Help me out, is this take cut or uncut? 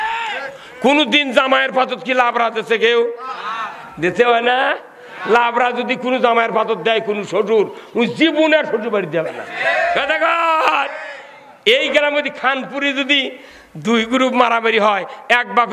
cut